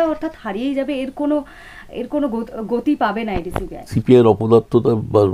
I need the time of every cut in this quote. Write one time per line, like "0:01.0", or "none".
0:03.9